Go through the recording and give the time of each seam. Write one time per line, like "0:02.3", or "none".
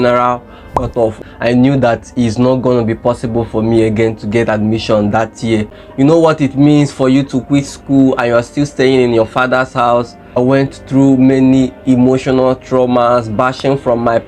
0:01.2
0:05.8
0:10.2